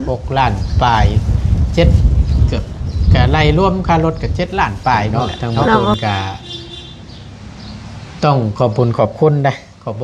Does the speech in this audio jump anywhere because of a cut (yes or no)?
yes